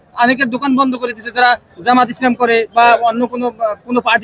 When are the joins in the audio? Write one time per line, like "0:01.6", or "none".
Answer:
none